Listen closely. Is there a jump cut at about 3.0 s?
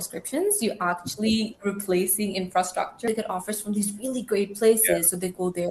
yes; 1 cut; at 3.0 s

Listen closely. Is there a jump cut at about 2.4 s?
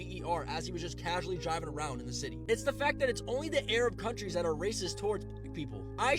no; 0 cuts

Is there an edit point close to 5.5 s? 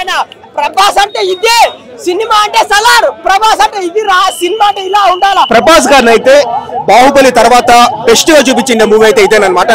yes; 1 cut; at 5.5 s

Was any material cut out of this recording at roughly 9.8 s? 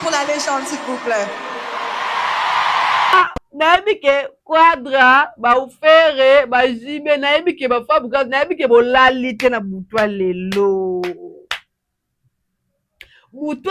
no; 1 cut; at 3.1 s

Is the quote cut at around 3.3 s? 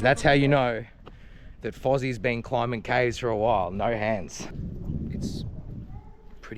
no; 1 cut; at 4.5 s

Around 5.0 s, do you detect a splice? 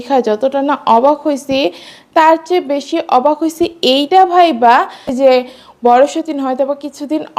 yes; 1 cut; at 5.0 s

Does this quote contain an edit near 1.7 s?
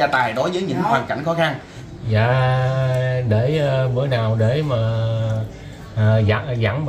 yes; 1 cut; at 1.7 s

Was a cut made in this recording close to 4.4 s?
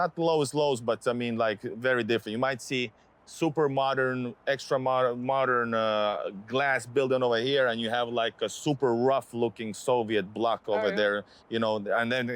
no; 0 cuts

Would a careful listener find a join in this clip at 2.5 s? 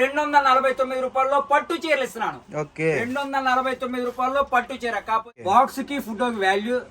no; 1 cut; at 5.3 s

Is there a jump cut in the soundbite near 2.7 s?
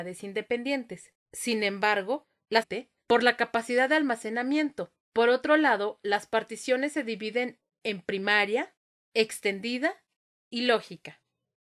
no; 0 cuts

